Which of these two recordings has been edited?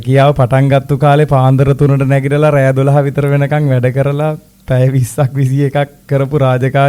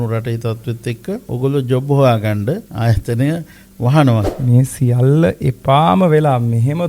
second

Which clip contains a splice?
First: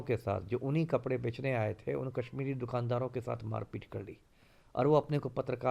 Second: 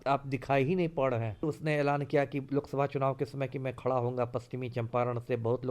second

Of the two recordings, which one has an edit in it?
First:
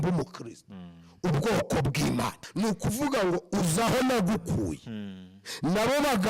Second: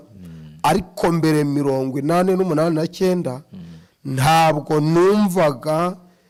first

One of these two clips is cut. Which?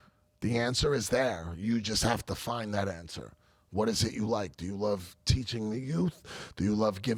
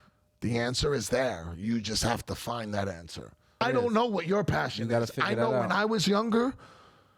second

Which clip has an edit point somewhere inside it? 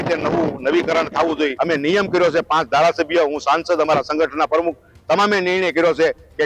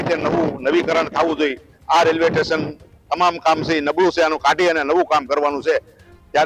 first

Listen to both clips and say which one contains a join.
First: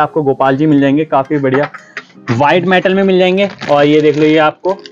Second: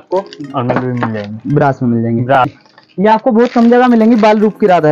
second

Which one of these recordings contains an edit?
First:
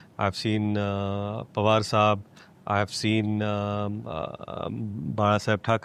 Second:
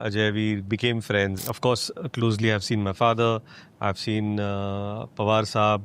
second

